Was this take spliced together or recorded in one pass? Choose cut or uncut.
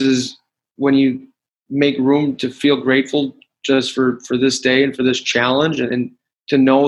uncut